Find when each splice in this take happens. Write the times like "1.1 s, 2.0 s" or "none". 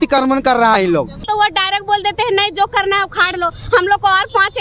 1.3 s